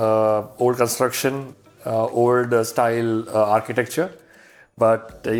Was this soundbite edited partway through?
no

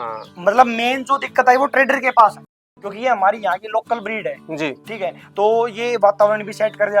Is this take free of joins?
no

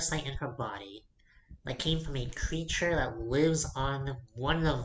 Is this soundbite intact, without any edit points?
yes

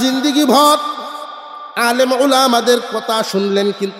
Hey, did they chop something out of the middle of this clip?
no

